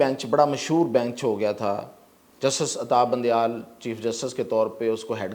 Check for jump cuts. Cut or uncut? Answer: uncut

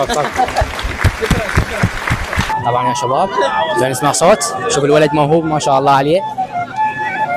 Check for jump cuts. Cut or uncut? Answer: uncut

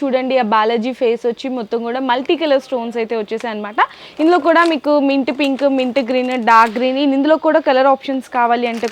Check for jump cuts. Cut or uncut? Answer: uncut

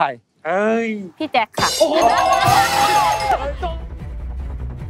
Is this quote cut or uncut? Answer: cut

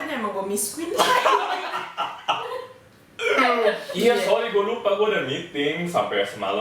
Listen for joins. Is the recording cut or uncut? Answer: cut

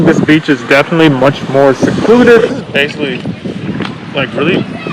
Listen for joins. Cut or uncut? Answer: cut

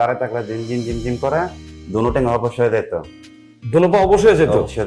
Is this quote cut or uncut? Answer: uncut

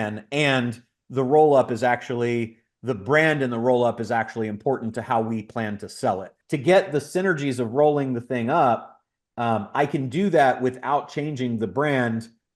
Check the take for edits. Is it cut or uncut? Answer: cut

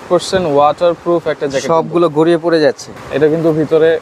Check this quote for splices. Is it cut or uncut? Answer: cut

